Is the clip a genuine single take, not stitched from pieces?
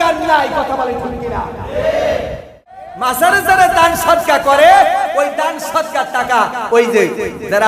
no; 1 cut; at 2.7 s

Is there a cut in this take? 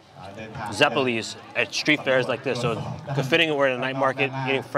no; 0 cuts

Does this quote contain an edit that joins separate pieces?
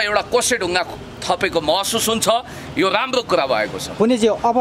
no; 0 cuts

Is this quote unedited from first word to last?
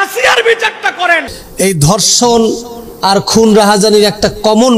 no; 1 cut; at 1.4 s

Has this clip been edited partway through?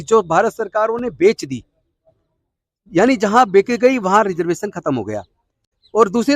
no; 0 cuts

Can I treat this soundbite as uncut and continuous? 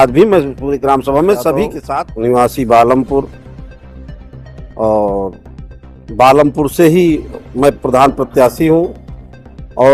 no; 3 cuts; at 1.8 s, 3.4 s, 4.7 s

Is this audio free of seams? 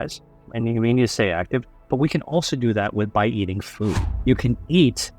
no; 1 cut; at 4.1 s

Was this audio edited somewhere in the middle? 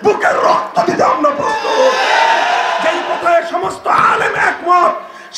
yes; 1 cut; at 2.8 s

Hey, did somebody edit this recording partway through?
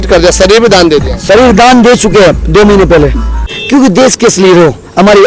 yes; 1 cut; at 3.6 s

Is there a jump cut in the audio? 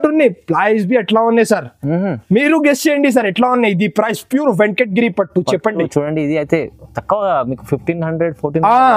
no; 0 cuts

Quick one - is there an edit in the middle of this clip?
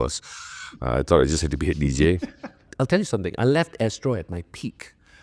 yes; 1 cut; at 2.6 s

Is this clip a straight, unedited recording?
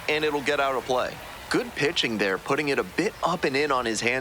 no; 1 cut; at 1.3 s

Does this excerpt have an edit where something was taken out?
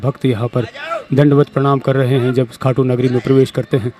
no; 0 cuts

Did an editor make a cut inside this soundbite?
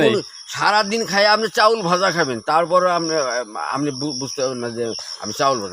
no; 0 cuts

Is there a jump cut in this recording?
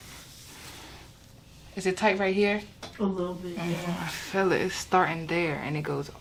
no; 0 cuts

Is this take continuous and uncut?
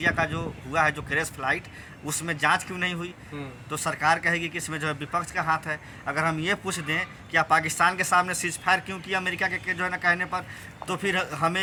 yes; 0 cuts

